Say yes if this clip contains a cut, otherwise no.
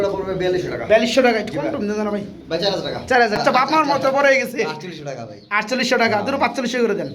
yes